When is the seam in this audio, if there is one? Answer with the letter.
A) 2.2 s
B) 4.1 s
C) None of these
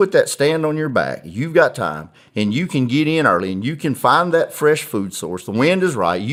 C